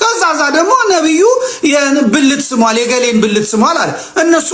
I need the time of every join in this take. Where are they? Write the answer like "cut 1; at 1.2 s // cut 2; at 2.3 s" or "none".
none

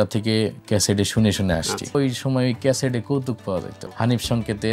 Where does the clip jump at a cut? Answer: cut 1; at 1.9 s // cut 2; at 3.8 s

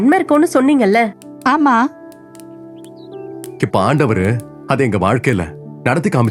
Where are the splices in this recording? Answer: none

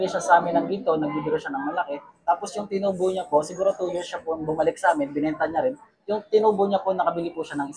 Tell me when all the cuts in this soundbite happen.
none

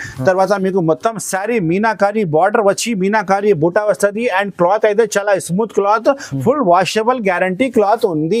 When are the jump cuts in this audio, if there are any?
none

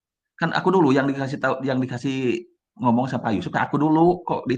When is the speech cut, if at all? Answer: none

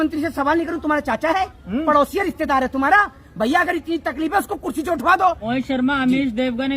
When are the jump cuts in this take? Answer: cut 1; at 5.4 s

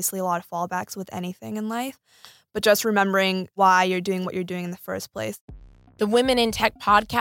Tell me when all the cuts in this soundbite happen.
cut 1; at 3.5 s // cut 2; at 5.4 s

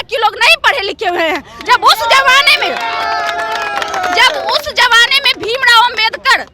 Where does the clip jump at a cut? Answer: none

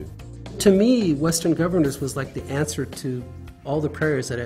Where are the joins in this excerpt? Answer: cut 1; at 3.6 s

